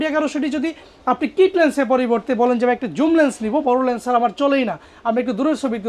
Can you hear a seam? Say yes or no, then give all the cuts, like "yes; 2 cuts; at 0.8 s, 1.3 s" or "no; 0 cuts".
no; 0 cuts